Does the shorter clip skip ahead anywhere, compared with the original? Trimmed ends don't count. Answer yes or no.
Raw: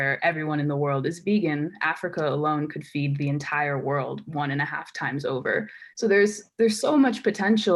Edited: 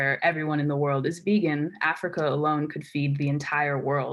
no